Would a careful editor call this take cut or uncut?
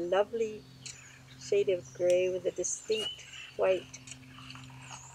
uncut